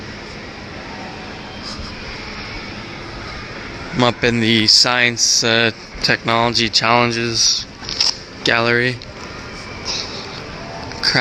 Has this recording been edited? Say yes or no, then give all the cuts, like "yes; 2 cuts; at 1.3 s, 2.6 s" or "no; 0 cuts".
yes; 1 cut; at 5.8 s